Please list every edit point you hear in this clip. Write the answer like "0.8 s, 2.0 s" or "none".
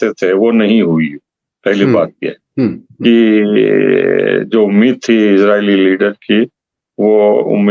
none